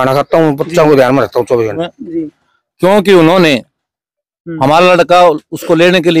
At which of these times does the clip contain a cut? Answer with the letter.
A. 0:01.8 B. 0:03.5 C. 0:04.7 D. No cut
A